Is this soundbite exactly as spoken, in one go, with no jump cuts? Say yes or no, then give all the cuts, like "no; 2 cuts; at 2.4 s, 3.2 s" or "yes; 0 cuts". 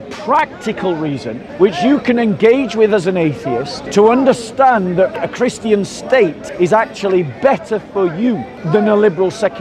no; 5 cuts; at 1.4 s, 3.8 s, 5.2 s, 6.4 s, 8.5 s